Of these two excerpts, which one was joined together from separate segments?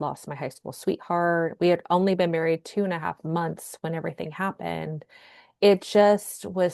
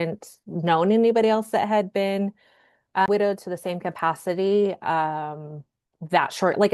second; 1 cut; at 3.1 s

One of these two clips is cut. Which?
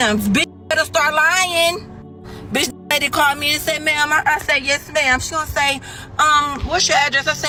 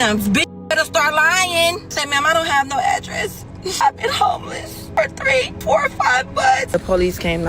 second; 5 cuts; at 2.0 s, 3.8 s, 4.8 s, 5.5 s, 6.7 s

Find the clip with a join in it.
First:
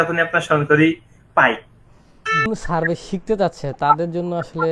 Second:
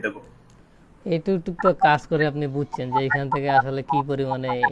first; 1 cut; at 2.5 s

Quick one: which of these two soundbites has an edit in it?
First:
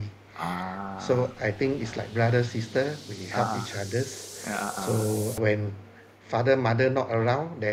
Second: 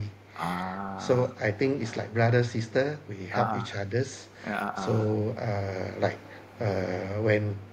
first; 1 cut; at 5.4 s

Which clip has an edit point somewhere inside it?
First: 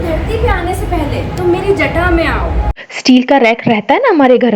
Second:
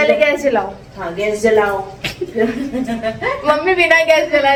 first; 1 cut; at 2.9 s

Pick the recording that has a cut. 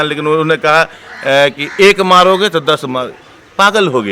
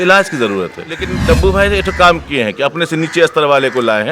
second; 1 cut; at 1.1 s

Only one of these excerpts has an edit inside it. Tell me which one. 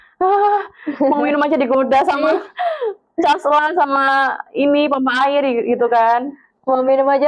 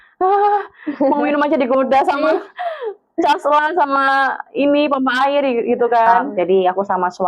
second; 1 cut; at 6.3 s

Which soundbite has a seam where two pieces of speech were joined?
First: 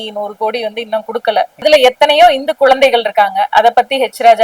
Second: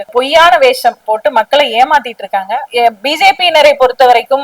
second; 2 cuts; at 1.1 s, 2.6 s

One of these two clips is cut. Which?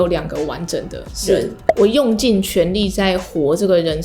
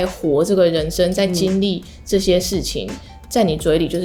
first; 1 cut; at 1.6 s

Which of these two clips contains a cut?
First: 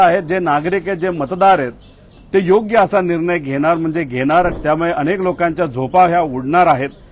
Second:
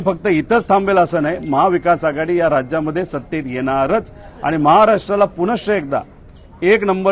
first; 1 cut; at 4.5 s

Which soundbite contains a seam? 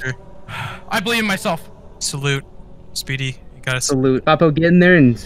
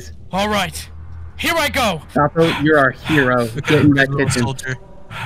first; 1 cut; at 4.2 s

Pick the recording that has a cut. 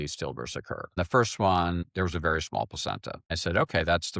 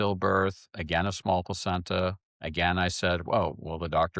first; 3 cuts; at 0.9 s, 1.9 s, 3.3 s

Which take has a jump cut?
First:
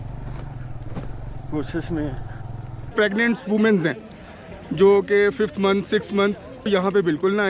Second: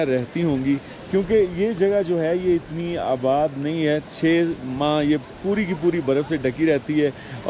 first; 2 cuts; at 2.9 s, 6.7 s

